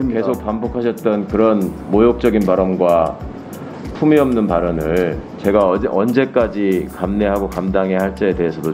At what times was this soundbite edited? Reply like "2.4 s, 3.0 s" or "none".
none